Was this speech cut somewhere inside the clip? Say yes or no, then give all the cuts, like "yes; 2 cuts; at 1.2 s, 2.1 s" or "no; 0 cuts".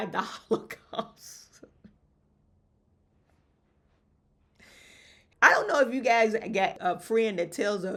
no; 0 cuts